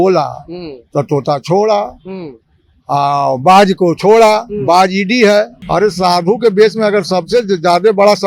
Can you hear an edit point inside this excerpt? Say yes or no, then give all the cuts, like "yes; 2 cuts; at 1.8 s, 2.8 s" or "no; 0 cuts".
yes; 1 cut; at 5.6 s